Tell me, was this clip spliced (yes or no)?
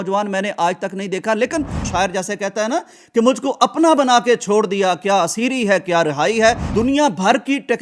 yes